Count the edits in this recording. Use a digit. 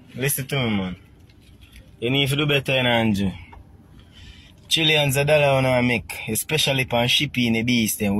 0